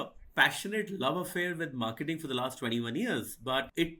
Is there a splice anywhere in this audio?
no; 0 cuts

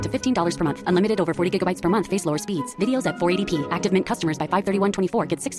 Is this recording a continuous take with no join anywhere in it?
yes; 0 cuts

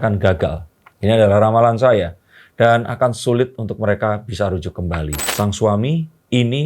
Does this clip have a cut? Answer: yes; 1 cut; at 5.2 s

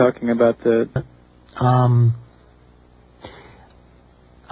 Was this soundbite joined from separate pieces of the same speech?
no; 0 cuts

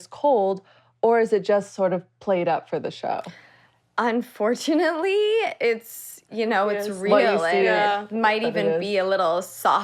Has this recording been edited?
no; 0 cuts

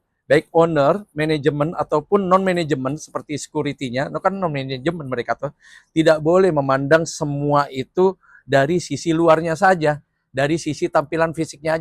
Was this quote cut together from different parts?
no; 0 cuts

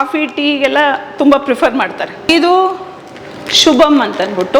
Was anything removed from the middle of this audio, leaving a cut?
yes; 1 cut; at 2.3 s

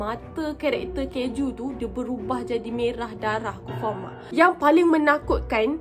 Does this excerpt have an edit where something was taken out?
yes; 1 cut; at 4.1 s

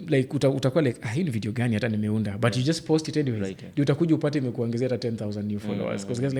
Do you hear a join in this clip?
no; 0 cuts

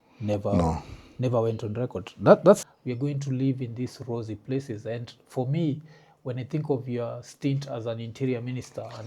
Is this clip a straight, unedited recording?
no; 1 cut; at 2.6 s

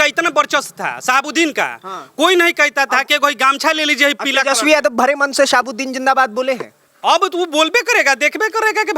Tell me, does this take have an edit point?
no; 0 cuts

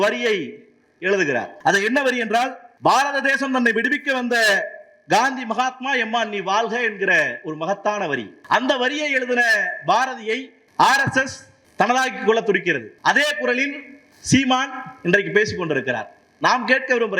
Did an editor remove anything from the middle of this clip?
yes; 4 cuts; at 1.5 s, 8.3 s, 10.6 s, 12.9 s

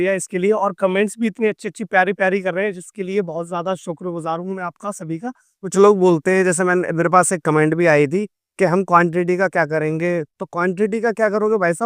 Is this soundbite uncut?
no; 1 cut; at 5.7 s

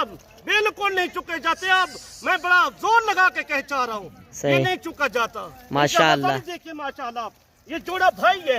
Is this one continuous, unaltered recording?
yes; 0 cuts

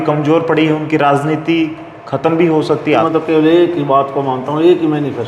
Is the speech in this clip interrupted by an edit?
yes; 1 cut; at 3.1 s

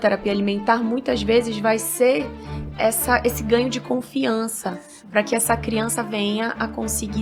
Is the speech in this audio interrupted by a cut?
no; 0 cuts

